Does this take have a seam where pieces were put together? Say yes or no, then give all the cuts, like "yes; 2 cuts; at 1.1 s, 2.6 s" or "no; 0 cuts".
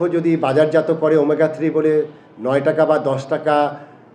no; 0 cuts